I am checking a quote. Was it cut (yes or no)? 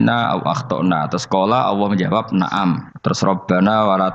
yes